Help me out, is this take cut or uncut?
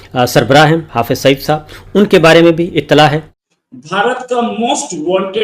cut